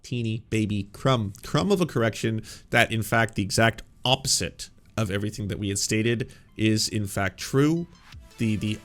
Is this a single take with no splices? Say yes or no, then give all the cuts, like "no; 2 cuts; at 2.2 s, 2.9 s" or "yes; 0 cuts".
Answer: yes; 0 cuts